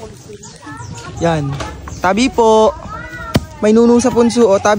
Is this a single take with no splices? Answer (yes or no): yes